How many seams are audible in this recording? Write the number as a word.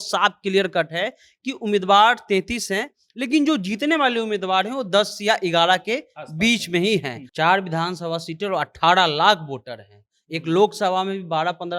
one